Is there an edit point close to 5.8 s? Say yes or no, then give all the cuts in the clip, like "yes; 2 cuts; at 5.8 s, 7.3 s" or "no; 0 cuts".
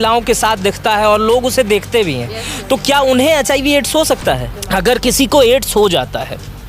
no; 1 cut; at 4.5 s